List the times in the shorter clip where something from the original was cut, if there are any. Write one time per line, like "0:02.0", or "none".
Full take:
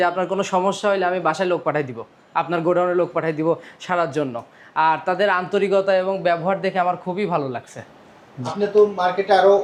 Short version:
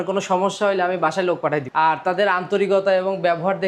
0:01.7

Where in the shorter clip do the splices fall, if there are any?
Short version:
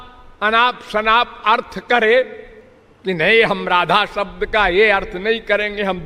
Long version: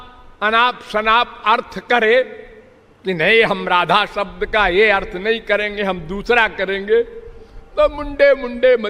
none

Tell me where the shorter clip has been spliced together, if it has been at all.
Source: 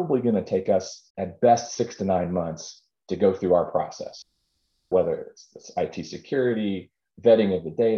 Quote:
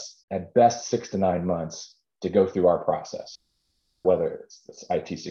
none

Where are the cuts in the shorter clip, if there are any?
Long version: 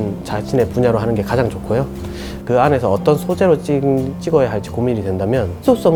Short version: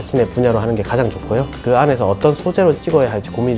0:01.5
0:02.8

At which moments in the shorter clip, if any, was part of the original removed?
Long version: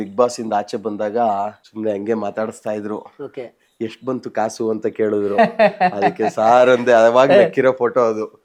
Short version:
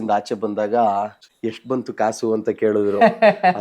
0:01.2

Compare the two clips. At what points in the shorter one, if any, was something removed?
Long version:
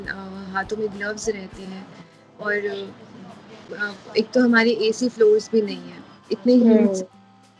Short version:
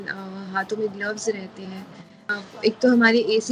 0:02.2

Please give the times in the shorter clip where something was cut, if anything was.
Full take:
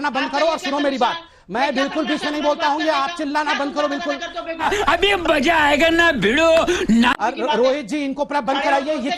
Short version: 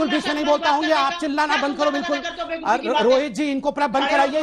0:02.6

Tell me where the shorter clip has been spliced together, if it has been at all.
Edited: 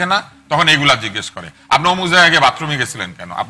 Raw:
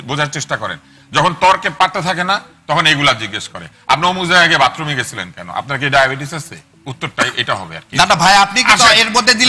none

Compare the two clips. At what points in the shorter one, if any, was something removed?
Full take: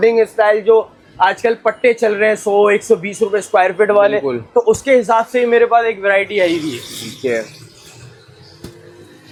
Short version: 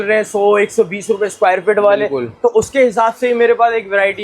none

